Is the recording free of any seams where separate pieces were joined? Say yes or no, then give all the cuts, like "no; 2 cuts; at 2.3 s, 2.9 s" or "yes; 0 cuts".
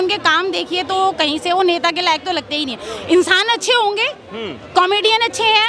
yes; 0 cuts